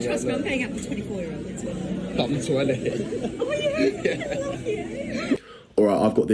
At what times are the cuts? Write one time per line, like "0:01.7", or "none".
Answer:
0:05.4